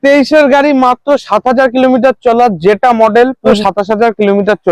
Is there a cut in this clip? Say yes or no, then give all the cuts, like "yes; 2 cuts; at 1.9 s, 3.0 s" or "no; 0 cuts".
yes; 1 cut; at 3.5 s